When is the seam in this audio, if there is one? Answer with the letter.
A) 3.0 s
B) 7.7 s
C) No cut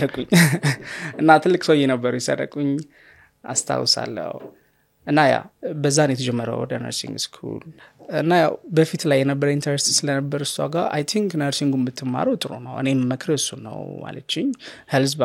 B